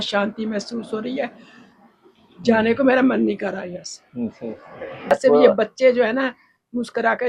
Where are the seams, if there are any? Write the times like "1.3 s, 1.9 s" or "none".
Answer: 5.1 s